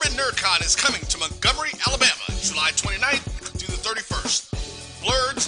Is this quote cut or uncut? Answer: cut